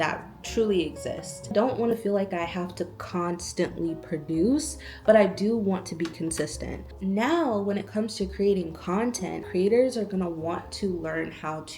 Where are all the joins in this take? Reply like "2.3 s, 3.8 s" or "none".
1.5 s, 6.8 s